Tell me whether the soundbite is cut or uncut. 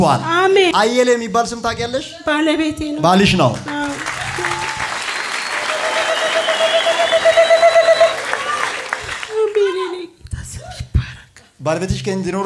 cut